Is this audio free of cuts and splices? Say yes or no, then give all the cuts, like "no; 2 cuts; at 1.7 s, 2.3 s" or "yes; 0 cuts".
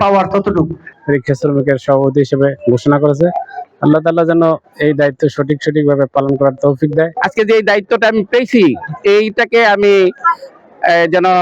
no; 2 cuts; at 0.9 s, 7.2 s